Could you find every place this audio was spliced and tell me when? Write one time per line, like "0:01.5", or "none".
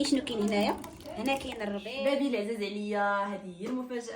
0:01.8